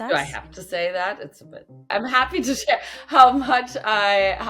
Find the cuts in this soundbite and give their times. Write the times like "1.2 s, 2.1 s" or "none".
1.9 s